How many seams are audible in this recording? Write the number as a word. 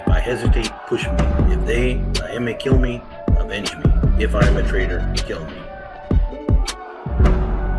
one